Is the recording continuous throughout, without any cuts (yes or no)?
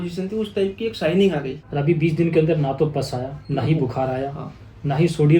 no